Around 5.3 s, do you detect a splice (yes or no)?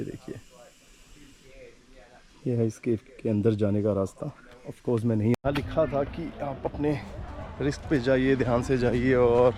yes